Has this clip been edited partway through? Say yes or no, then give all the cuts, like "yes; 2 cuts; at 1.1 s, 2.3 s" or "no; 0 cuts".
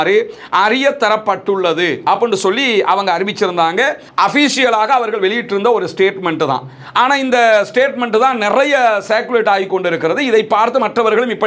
no; 0 cuts